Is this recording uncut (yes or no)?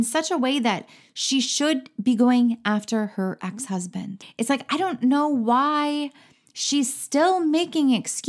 no